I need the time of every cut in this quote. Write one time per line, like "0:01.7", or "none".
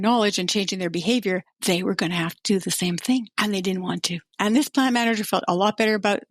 0:01.5
0:03.3
0:04.3